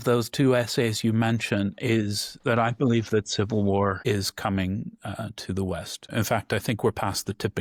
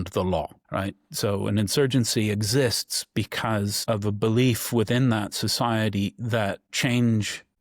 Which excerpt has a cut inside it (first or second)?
second